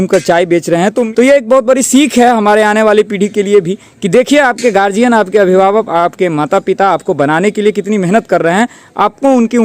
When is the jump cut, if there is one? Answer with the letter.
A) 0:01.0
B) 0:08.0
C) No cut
A